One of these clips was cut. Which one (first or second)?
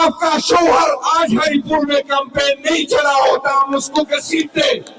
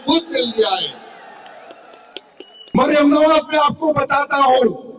second